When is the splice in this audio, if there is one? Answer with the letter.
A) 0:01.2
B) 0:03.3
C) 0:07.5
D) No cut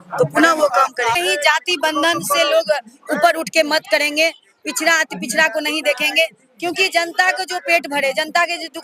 A